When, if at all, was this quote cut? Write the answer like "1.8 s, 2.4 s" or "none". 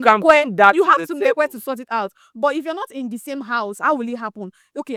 none